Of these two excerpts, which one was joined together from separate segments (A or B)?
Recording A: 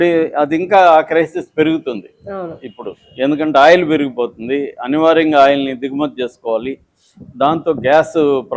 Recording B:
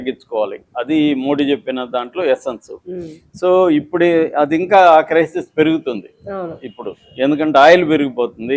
A